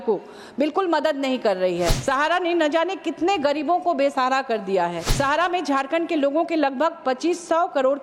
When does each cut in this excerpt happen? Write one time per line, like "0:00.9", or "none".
0:02.0
0:05.0